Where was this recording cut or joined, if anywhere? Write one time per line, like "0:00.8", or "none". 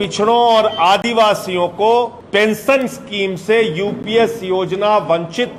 0:02.2